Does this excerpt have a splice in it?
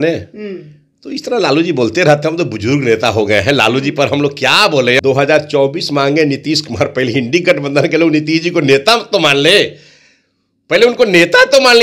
yes; 1 cut; at 5.0 s

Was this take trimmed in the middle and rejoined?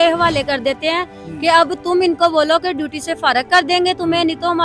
no; 0 cuts

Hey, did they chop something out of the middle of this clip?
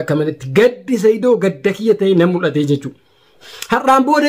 yes; 1 cut; at 3.2 s

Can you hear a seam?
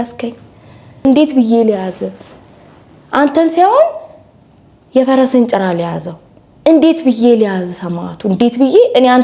yes; 1 cut; at 1.0 s

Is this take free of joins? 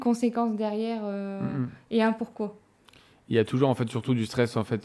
yes; 0 cuts

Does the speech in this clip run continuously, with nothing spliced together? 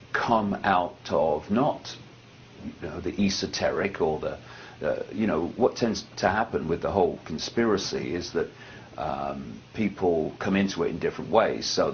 yes; 0 cuts

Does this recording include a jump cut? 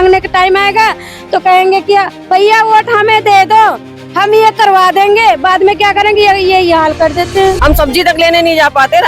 yes; 1 cut; at 7.6 s

